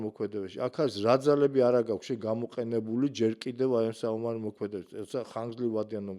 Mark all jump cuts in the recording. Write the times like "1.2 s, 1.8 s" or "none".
none